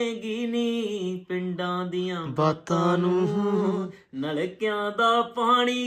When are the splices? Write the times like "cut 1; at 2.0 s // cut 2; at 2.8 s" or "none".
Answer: none